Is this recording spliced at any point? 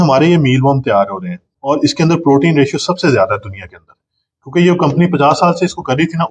yes; 1 cut; at 1.5 s

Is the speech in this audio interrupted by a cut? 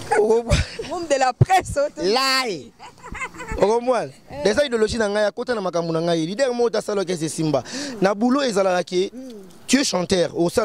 no; 0 cuts

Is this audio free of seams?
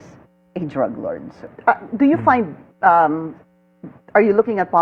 no; 1 cut; at 1.5 s

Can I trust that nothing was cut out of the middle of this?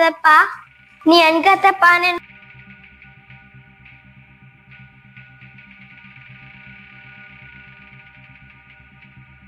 yes; 0 cuts

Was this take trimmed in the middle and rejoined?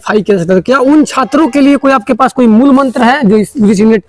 no; 0 cuts

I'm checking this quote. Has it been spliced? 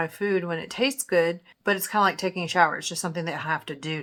no; 0 cuts

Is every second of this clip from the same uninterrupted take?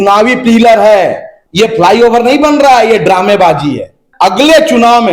no; 2 cuts; at 1.3 s, 4.0 s

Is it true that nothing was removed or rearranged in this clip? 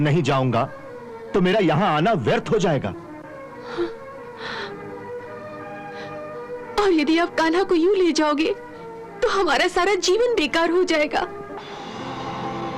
yes; 0 cuts

